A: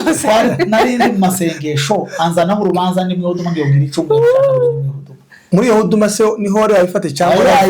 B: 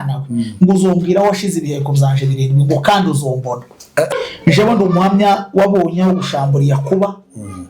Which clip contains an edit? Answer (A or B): B